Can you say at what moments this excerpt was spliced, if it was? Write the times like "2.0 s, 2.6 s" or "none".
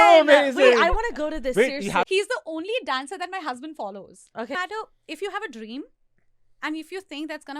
2.1 s, 4.6 s